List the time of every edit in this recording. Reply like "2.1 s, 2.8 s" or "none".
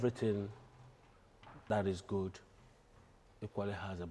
1.6 s